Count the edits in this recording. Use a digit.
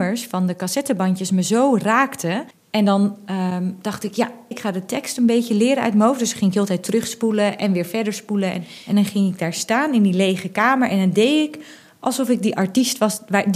3